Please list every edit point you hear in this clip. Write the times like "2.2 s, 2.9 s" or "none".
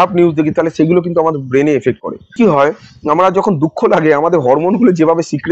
2.3 s